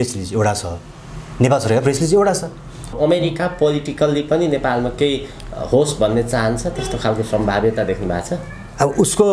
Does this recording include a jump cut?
yes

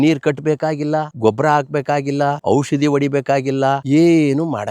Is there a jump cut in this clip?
yes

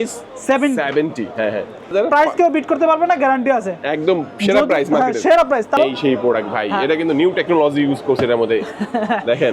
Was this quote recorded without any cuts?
no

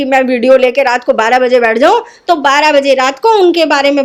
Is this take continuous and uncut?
yes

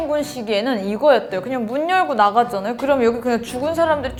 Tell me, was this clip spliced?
no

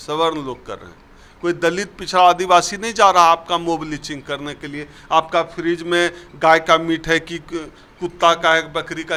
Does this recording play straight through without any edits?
yes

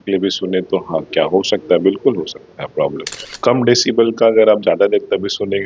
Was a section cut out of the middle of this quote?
yes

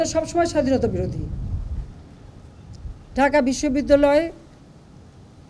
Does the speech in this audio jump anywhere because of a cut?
no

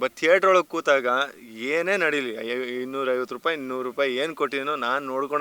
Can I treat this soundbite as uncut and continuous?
yes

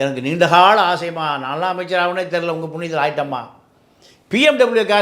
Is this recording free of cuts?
yes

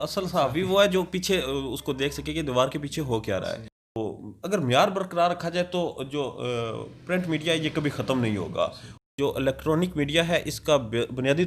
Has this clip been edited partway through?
yes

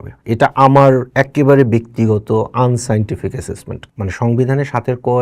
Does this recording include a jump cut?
yes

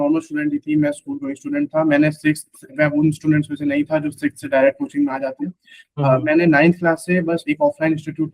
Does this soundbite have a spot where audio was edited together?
no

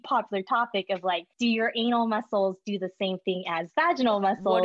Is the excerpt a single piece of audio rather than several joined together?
no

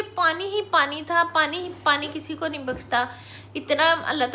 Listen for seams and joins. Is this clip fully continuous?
yes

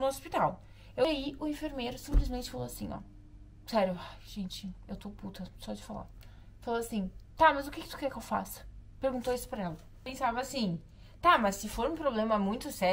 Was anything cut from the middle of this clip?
yes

